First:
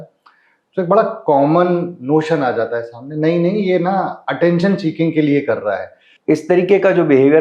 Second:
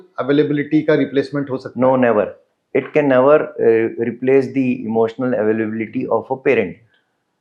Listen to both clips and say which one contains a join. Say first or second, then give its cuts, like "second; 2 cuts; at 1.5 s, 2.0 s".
first; 1 cut; at 6.1 s